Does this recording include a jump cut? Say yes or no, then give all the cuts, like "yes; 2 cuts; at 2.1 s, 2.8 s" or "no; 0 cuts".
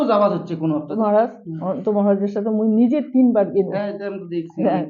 yes; 1 cut; at 0.9 s